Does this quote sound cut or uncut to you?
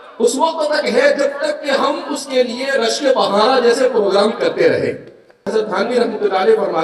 cut